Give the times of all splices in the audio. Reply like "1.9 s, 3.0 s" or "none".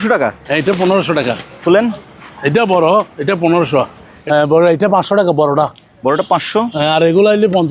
4.1 s